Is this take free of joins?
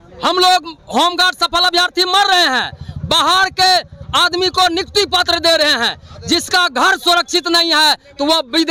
yes; 0 cuts

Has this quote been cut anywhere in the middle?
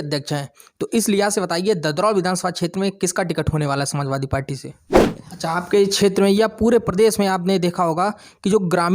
yes; 1 cut; at 5.2 s

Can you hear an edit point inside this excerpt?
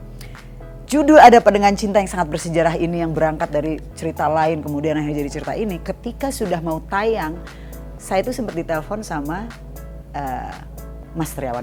no; 0 cuts

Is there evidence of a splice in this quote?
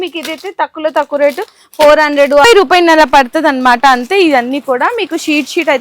yes; 1 cut; at 2.4 s

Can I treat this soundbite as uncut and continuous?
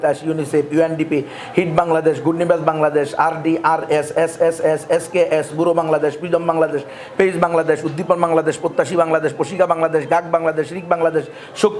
yes; 0 cuts

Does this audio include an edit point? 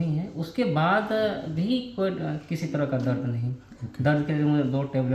no; 0 cuts

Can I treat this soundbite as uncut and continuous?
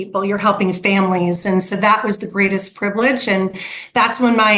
yes; 0 cuts

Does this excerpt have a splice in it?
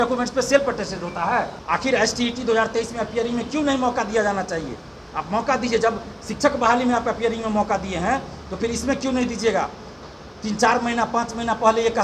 yes; 1 cut; at 1.6 s

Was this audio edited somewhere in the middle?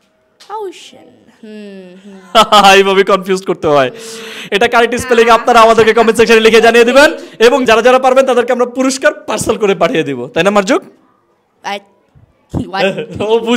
no; 0 cuts

